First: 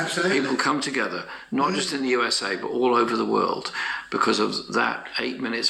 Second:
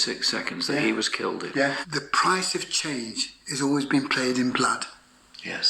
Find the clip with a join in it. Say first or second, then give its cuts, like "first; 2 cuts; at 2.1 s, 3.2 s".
second; 1 cut; at 1.8 s